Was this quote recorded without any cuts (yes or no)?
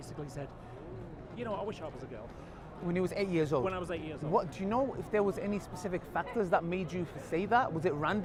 yes